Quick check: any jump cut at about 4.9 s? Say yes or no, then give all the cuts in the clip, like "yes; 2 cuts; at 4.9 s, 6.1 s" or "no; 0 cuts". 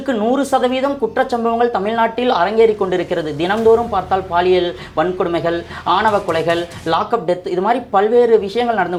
no; 0 cuts